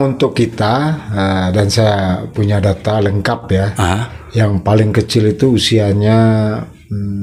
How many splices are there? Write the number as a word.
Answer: zero